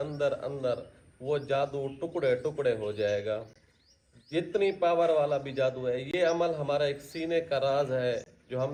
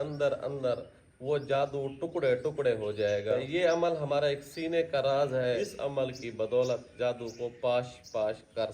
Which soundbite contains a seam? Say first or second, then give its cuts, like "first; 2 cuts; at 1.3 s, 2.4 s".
second; 2 cuts; at 3.4 s, 5.7 s